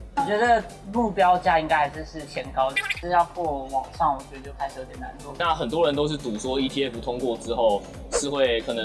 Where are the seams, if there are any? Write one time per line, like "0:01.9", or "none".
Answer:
0:02.8
0:05.4